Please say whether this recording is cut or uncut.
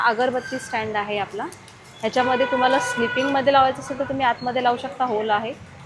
uncut